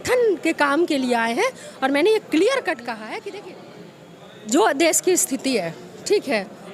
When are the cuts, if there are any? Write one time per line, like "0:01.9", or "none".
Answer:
0:03.3